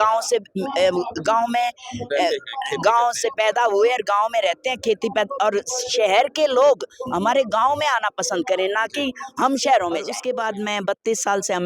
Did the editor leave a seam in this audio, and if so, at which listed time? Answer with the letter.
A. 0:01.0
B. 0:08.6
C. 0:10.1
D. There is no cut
C